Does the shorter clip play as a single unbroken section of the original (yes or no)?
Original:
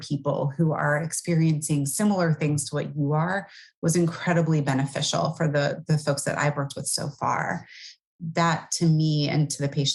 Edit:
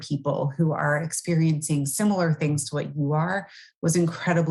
yes